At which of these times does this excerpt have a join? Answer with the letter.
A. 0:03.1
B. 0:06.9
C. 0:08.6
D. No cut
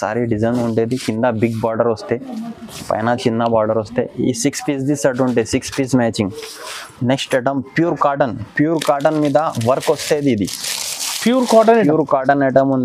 B